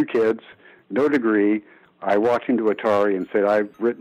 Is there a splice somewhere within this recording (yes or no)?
no